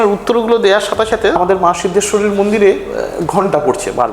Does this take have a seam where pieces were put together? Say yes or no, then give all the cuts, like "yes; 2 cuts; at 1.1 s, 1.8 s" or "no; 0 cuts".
yes; 1 cut; at 1.4 s